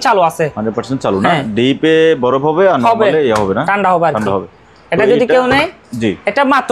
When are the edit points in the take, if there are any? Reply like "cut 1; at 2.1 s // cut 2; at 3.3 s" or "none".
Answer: none